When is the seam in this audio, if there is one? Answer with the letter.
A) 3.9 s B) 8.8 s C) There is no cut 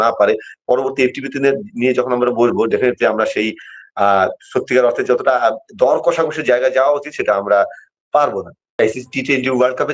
B